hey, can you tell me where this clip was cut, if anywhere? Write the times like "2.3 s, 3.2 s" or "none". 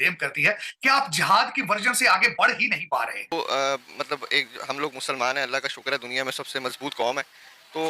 3.3 s